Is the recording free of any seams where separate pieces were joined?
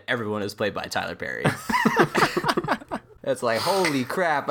no; 1 cut; at 3.1 s

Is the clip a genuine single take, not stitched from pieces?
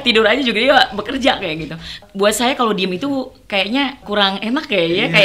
no; 2 cuts; at 2.0 s, 4.0 s

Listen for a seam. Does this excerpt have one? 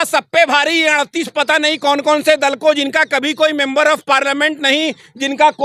no; 0 cuts

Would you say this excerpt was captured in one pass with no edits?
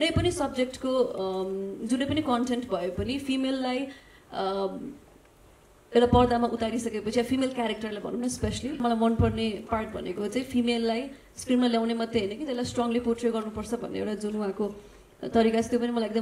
no; 1 cut; at 8.8 s

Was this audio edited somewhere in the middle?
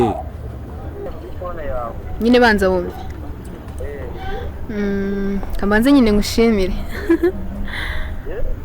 yes; 1 cut; at 1.1 s

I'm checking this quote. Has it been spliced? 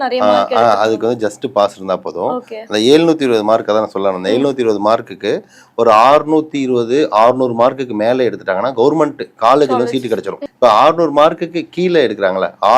yes; 1 cut; at 10.4 s

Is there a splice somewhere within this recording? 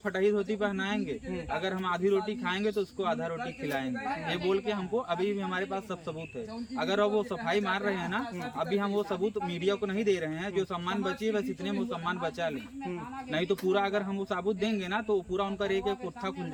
no; 0 cuts

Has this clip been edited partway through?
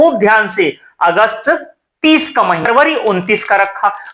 yes; 1 cut; at 2.7 s

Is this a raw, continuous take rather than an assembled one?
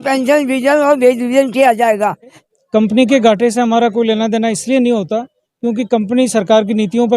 no; 1 cut; at 2.4 s

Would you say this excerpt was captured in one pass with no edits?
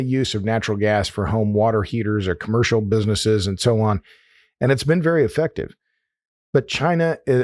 yes; 0 cuts

